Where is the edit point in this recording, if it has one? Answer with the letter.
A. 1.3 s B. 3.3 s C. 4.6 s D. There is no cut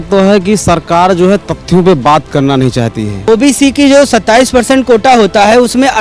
B